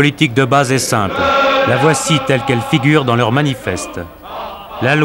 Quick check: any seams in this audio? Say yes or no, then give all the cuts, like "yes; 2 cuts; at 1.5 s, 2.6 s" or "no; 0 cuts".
no; 0 cuts